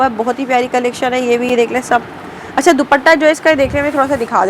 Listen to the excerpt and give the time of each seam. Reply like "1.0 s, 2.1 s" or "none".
none